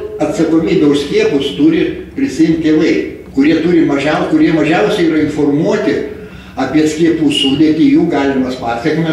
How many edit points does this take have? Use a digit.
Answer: 0